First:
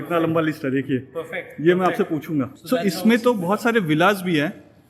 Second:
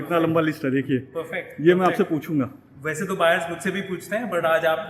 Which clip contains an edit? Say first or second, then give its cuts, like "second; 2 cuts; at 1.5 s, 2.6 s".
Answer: first; 1 cut; at 2.6 s